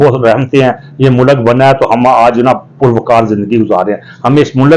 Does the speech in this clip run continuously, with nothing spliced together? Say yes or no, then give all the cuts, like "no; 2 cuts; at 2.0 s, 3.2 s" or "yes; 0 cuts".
yes; 0 cuts